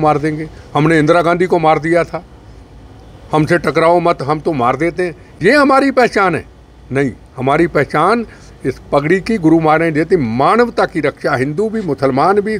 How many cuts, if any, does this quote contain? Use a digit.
0